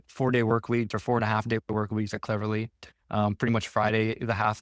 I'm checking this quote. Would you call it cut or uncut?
uncut